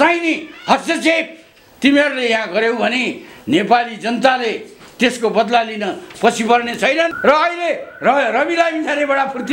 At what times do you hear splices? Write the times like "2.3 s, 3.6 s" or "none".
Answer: 7.2 s